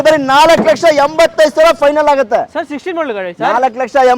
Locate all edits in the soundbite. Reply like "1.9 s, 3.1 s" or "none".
none